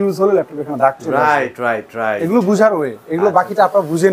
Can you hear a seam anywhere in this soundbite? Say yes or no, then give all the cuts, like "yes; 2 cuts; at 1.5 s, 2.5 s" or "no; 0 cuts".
no; 0 cuts